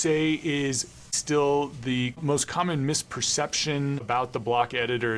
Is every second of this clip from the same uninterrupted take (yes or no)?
no